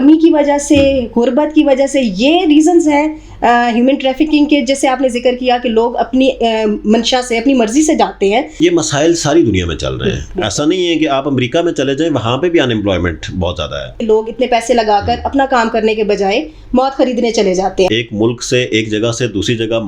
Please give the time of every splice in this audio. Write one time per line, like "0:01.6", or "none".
0:08.6
0:14.0
0:17.9